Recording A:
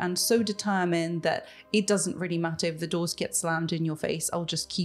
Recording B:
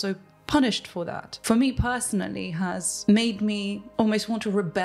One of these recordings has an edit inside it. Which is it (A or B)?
B